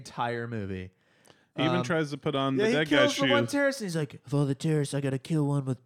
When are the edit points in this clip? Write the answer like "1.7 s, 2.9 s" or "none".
none